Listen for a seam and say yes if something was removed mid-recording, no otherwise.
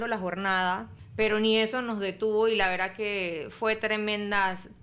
yes